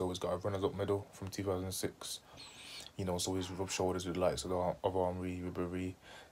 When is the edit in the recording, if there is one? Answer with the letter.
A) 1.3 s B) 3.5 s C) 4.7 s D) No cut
D